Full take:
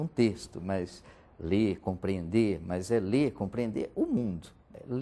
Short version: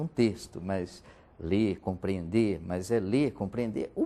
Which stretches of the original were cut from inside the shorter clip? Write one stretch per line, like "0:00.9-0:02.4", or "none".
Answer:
none